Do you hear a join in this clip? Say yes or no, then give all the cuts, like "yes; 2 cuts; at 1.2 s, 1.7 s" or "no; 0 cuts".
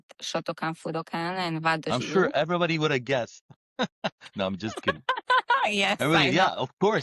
no; 0 cuts